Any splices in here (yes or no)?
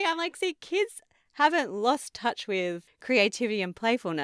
yes